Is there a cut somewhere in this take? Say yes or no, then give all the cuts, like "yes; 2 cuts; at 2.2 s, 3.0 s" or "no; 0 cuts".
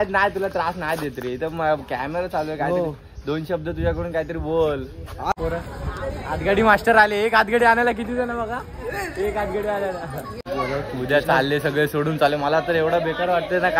yes; 2 cuts; at 5.3 s, 10.4 s